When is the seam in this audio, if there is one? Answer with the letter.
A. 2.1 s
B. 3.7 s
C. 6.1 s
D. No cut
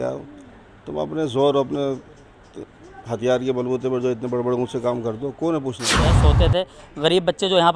C